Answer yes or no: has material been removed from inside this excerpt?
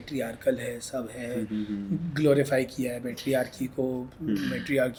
no